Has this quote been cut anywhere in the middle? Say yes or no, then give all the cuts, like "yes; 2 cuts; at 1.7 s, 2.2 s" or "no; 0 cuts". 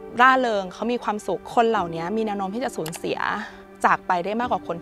yes; 1 cut; at 1.4 s